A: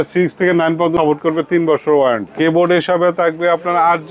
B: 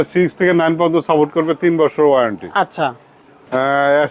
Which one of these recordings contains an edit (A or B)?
A